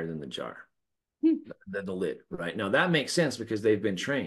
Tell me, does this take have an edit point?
no; 0 cuts

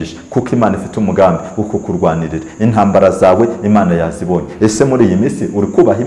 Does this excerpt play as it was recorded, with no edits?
yes; 0 cuts

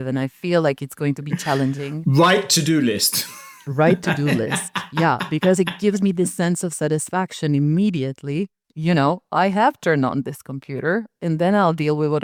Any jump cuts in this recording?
no; 0 cuts

